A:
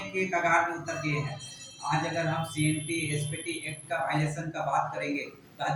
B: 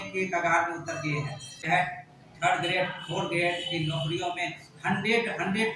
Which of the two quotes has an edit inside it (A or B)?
B